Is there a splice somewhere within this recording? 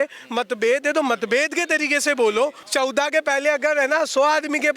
yes; 1 cut; at 2.6 s

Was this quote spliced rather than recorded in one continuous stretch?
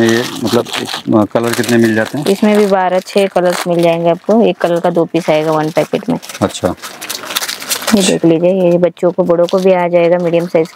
no; 0 cuts

